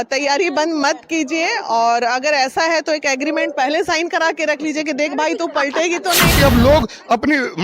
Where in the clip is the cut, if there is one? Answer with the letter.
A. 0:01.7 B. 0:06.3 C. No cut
B